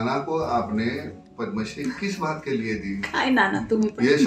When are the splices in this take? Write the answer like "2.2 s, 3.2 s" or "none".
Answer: none